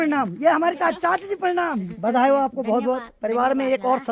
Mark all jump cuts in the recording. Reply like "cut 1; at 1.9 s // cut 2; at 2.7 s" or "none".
cut 1; at 1.9 s